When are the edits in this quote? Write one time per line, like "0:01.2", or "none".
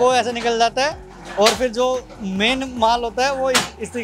none